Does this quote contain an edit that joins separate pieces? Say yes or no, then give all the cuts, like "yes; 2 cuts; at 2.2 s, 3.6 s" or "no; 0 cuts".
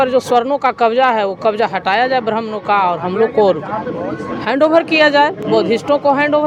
no; 0 cuts